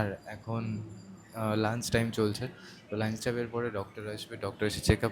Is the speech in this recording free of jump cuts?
yes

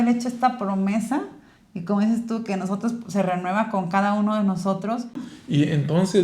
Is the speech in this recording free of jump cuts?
no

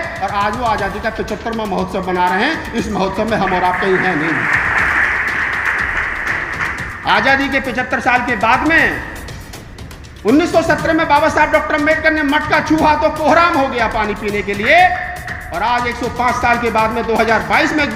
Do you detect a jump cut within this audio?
yes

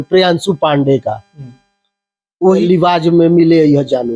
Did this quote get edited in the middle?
yes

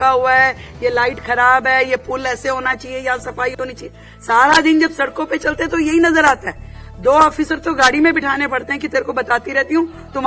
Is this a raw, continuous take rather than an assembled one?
yes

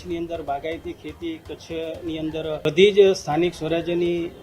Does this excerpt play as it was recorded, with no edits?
no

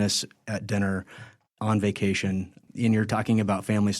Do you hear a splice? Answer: yes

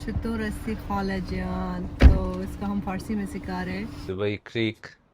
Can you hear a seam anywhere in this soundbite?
yes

